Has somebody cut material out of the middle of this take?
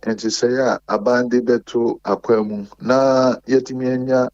no; 0 cuts

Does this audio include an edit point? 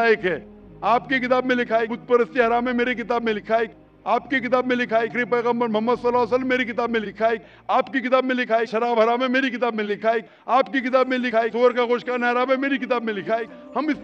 no; 0 cuts

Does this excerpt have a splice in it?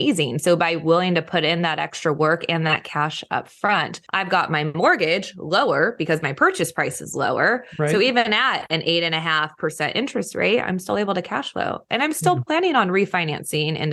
yes; 1 cut; at 4.0 s

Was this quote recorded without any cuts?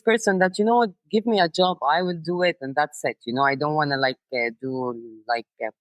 yes; 0 cuts

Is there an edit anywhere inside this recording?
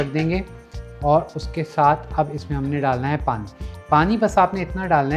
no; 0 cuts

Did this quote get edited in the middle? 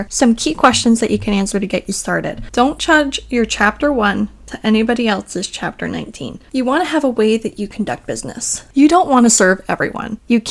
yes; 3 cuts; at 2.4 s, 6.5 s, 8.5 s

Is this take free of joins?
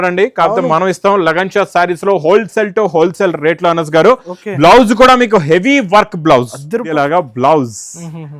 no; 1 cut; at 6.9 s

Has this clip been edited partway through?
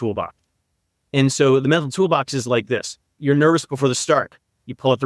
no; 0 cuts

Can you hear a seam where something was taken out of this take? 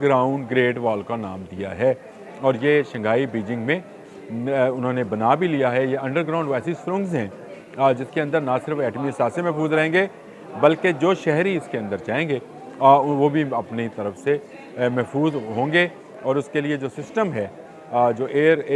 no; 0 cuts

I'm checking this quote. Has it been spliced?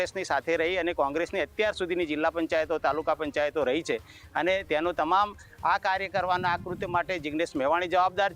no; 0 cuts

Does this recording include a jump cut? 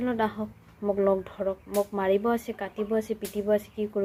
no; 0 cuts

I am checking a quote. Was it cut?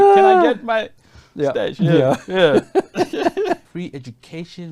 yes; 1 cut; at 3.8 s

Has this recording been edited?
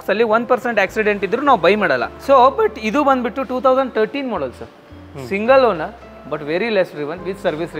yes; 1 cut; at 2.1 s

